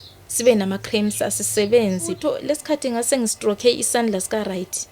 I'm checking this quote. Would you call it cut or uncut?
cut